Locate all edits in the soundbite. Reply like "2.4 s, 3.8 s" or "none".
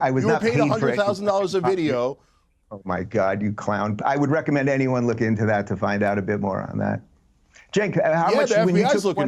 none